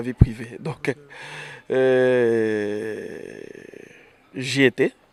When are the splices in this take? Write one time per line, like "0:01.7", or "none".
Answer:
none